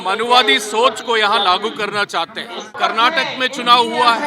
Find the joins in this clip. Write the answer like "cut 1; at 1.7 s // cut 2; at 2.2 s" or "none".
cut 1; at 2.7 s

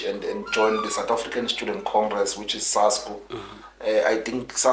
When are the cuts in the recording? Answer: none

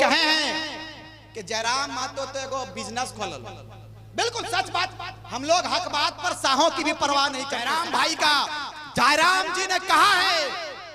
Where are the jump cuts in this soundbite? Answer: cut 1; at 7.6 s

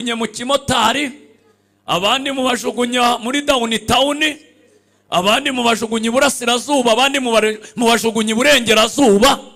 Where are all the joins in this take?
none

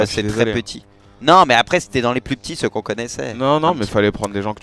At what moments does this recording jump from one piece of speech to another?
cut 1; at 1.2 s

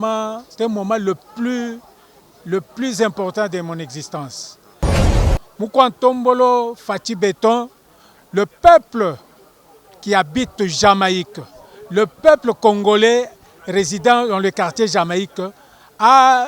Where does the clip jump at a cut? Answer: cut 1; at 5.1 s

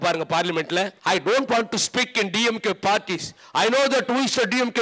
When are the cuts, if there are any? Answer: cut 1; at 0.9 s

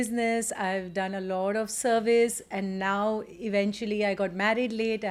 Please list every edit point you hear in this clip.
none

